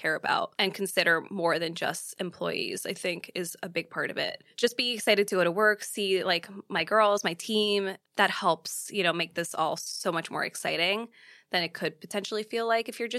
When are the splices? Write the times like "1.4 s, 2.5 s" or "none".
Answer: 4.5 s, 8.0 s